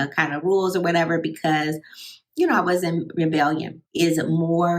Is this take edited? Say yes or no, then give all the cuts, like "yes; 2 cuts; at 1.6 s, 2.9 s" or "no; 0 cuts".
yes; 1 cut; at 3.8 s